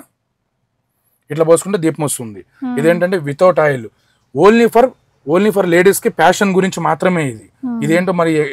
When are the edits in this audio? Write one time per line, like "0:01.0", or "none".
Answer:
none